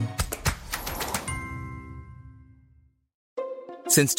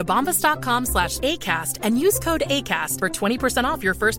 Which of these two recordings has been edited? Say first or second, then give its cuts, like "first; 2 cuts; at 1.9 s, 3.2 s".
first; 1 cut; at 3.1 s